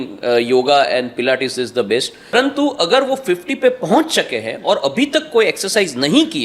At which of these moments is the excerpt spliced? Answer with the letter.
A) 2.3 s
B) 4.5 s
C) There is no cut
A